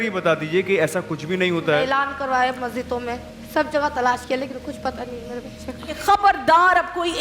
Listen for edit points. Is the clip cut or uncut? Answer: cut